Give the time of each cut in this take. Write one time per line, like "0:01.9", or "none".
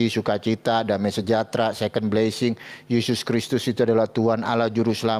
none